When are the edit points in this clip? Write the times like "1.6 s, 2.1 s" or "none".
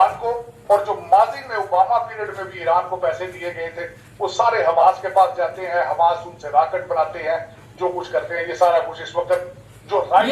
none